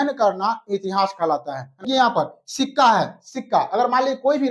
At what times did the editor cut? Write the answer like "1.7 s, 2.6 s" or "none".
1.8 s